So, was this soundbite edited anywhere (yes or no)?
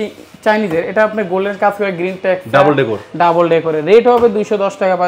no